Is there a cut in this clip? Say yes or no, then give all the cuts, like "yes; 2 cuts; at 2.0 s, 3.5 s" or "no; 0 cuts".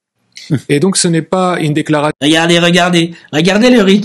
yes; 1 cut; at 1.0 s